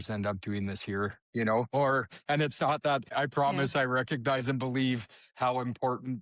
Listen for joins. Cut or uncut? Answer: cut